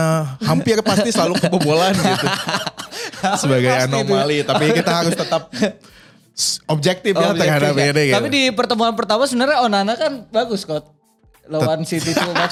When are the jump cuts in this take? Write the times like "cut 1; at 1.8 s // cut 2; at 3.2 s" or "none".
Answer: none